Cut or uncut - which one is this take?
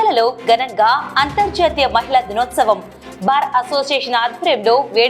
uncut